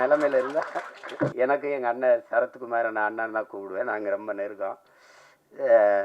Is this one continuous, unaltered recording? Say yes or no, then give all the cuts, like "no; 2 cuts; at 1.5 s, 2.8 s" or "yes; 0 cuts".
no; 1 cut; at 1.3 s